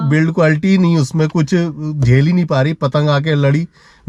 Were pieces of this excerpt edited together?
no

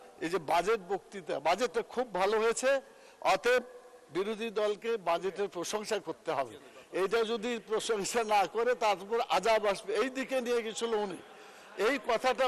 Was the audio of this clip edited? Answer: no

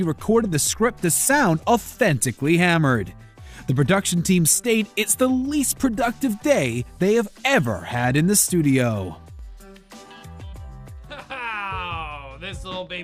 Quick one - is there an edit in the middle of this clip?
no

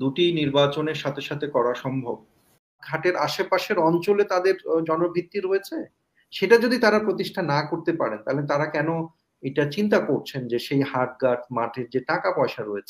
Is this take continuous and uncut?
no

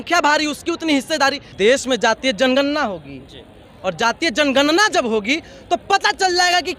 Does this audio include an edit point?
yes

